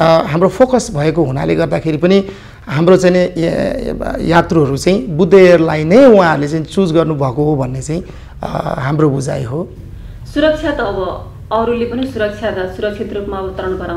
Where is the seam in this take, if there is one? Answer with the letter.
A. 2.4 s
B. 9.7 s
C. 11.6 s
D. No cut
D